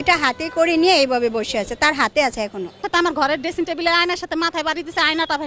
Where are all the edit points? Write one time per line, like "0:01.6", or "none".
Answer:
0:02.8